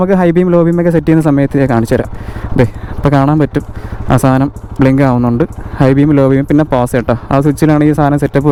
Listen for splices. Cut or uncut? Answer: uncut